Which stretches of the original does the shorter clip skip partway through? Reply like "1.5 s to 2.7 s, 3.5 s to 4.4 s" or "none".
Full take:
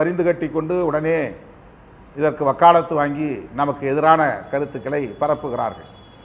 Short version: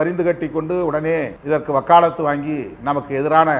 1.4 s to 2.1 s

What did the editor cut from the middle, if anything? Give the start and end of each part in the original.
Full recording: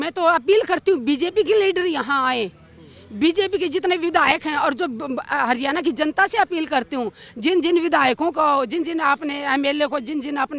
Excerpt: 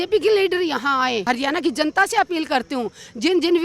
2.5 s to 5.5 s

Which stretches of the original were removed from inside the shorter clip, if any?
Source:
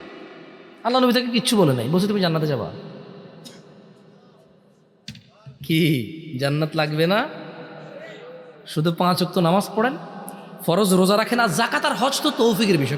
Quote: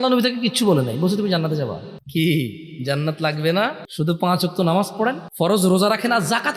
2.8 s to 5.5 s, 7.4 s to 8.6 s, 10.0 s to 10.5 s

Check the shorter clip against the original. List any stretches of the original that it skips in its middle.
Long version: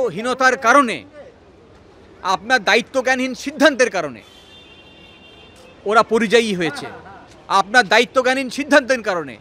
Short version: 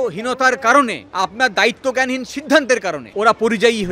1.0 s to 2.1 s, 4.1 s to 5.7 s

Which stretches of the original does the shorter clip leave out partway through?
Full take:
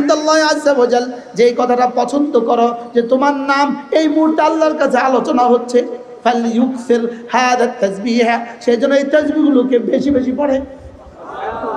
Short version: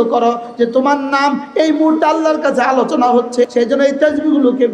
5.9 s to 8.6 s

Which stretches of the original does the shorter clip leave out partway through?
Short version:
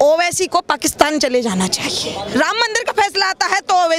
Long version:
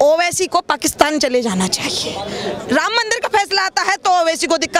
2.3 s to 2.6 s

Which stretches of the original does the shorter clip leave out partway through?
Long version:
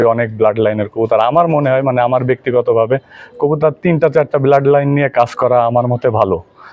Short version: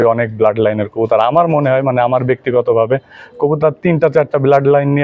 none

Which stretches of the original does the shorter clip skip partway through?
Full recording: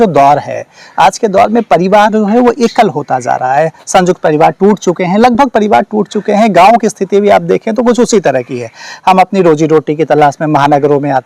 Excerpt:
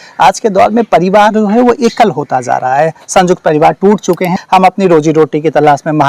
5.1 s to 8.9 s

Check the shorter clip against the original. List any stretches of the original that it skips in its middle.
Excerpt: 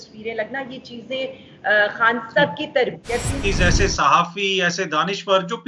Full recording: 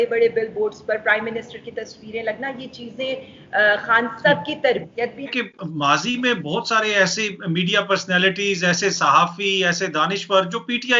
5.3 s to 8.4 s

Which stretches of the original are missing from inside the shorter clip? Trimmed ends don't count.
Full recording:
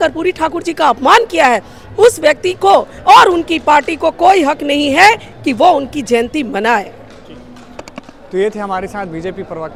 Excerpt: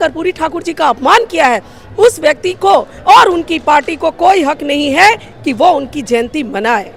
none

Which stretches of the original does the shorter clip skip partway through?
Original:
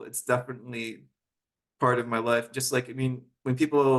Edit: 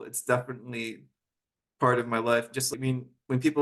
2.7 s to 2.9 s

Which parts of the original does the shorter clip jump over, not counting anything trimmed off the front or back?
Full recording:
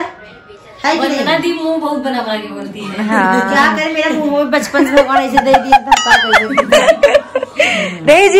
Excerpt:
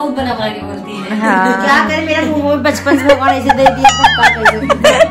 none

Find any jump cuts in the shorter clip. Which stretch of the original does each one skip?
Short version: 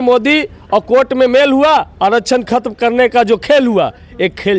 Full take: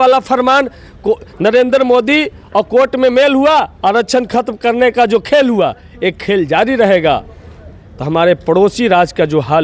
none

